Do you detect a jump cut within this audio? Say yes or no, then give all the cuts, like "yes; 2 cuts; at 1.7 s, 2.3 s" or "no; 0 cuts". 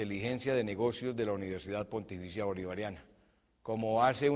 yes; 1 cut; at 1.1 s